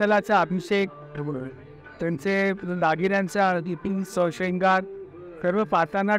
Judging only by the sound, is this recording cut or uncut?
uncut